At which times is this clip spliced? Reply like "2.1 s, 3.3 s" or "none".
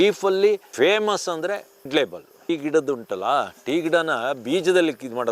2.5 s

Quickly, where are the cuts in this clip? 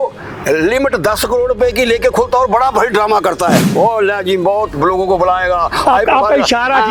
none

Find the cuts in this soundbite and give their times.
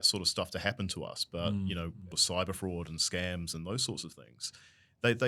2.1 s

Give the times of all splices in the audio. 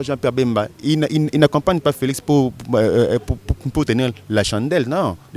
none

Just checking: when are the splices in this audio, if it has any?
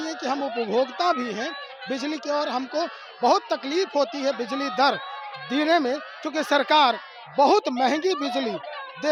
none

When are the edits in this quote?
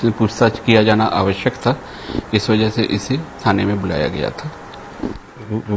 none

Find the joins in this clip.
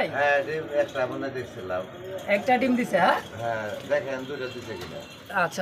none

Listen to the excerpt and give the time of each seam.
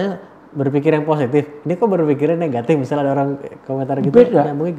none

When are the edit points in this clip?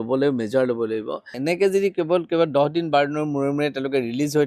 1.4 s

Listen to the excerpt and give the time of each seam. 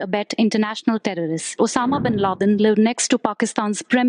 1.5 s

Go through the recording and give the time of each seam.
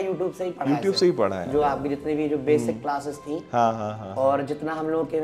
none

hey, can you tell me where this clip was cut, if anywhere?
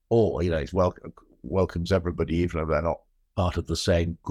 3.2 s

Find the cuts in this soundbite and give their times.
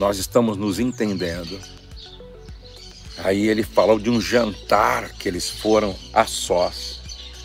1.7 s, 3.1 s

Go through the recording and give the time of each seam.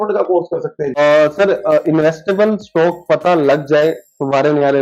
1.0 s

